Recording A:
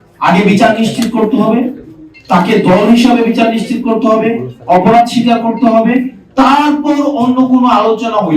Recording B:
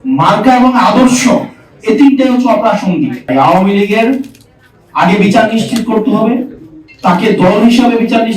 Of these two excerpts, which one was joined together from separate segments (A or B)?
B